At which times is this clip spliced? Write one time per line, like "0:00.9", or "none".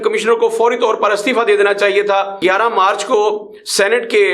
0:02.4